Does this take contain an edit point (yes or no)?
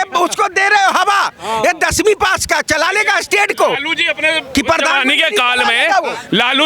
no